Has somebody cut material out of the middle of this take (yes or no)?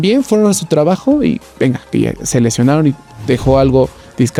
no